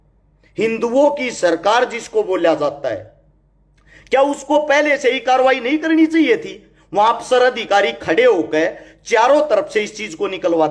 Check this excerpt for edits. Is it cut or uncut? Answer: uncut